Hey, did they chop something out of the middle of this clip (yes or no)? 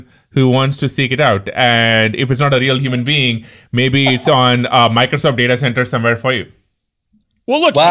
no